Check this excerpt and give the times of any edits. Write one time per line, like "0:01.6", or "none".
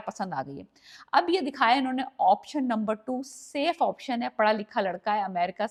none